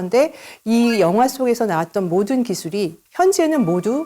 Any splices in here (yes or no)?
yes